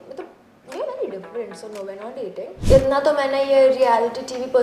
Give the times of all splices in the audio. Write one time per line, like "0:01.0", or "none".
0:02.5

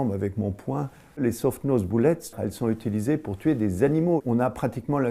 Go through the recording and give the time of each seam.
0:02.3
0:04.2

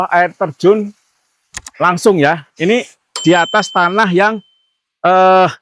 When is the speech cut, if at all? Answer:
0:03.1

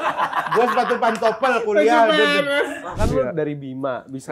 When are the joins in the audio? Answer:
0:02.9

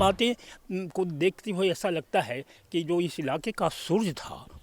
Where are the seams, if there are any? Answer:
none

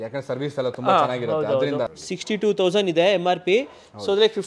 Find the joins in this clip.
0:02.0

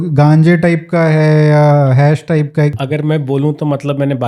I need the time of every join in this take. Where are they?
0:02.7

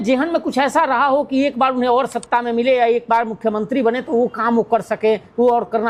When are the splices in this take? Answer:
none

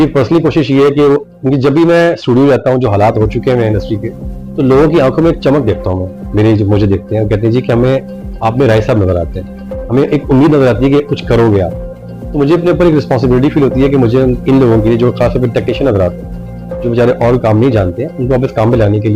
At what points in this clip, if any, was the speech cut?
none

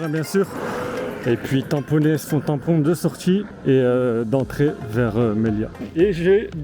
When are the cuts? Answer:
0:02.2
0:03.5
0:05.8

